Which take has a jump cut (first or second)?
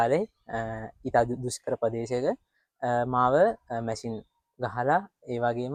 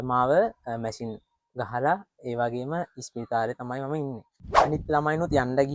second